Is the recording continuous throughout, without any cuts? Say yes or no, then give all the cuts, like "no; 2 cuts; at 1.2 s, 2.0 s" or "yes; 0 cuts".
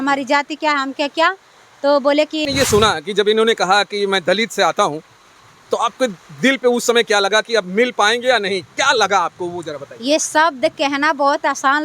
no; 1 cut; at 2.5 s